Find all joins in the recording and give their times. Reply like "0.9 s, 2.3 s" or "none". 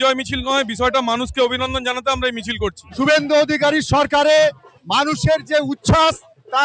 2.8 s